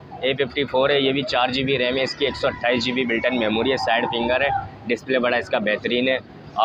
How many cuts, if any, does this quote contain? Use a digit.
0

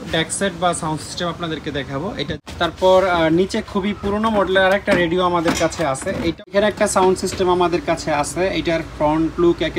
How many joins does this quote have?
2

